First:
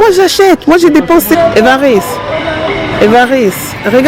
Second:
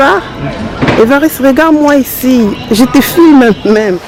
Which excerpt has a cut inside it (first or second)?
first